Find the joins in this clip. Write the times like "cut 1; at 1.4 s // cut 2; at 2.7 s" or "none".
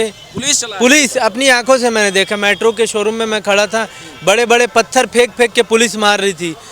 none